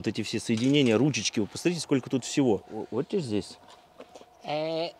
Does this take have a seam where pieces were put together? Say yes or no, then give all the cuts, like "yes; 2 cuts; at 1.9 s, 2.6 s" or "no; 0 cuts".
yes; 1 cut; at 2.8 s